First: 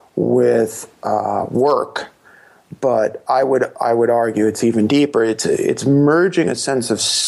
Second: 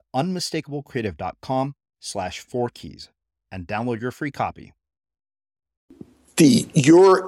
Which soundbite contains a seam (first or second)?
second